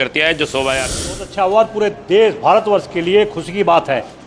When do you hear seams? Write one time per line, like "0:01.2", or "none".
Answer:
0:01.2